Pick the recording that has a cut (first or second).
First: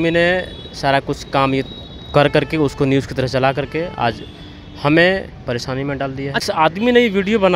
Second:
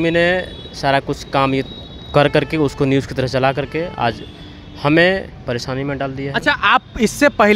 first